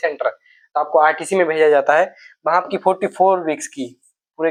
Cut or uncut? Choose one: uncut